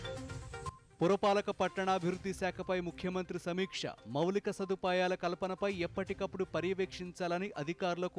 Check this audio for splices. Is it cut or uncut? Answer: cut